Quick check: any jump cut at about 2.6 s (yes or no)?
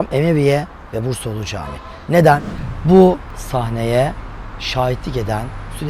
yes